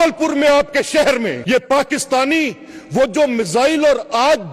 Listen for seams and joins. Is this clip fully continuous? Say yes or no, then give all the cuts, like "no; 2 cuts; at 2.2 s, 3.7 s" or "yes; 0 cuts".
no; 1 cut; at 1.6 s